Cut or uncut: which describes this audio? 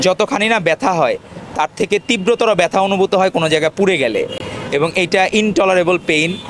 uncut